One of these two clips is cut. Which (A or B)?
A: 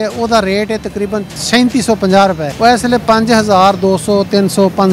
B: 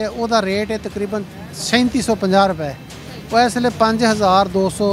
A